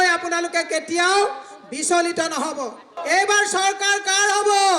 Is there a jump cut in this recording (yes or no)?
yes